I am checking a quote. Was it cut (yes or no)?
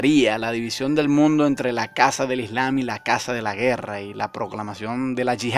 yes